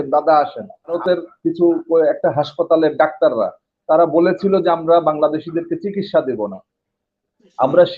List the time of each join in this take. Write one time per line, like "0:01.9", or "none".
0:01.0